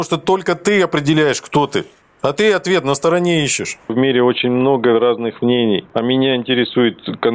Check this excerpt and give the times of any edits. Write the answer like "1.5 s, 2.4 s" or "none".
3.9 s, 5.9 s